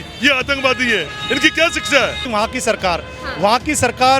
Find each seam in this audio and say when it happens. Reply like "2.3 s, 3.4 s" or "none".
2.2 s

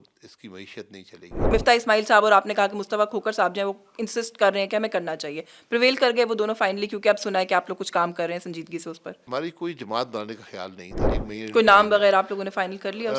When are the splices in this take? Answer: 1.5 s, 9.1 s, 11.2 s

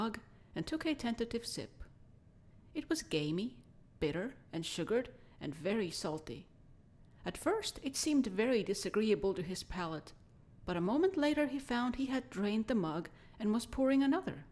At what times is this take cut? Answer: 12.4 s

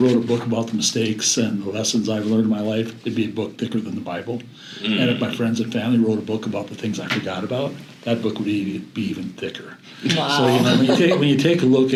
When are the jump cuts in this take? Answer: none

